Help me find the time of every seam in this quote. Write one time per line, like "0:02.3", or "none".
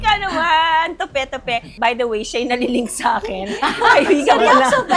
0:01.7